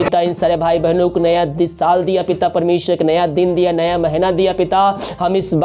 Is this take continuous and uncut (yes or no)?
yes